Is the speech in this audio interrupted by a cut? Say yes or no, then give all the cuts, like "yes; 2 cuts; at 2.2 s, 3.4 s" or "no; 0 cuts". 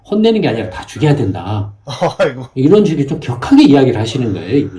no; 0 cuts